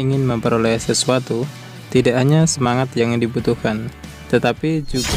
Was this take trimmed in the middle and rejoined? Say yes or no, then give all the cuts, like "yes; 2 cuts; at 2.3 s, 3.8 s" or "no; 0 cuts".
no; 0 cuts